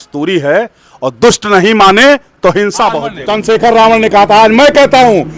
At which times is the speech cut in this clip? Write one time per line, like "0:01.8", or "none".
0:03.4